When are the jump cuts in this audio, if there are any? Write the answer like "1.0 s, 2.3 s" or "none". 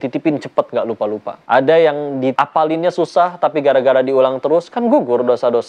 1.3 s, 2.3 s